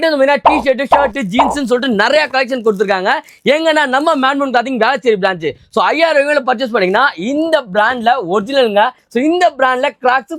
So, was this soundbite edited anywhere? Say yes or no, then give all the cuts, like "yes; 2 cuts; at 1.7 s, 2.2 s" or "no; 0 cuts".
no; 0 cuts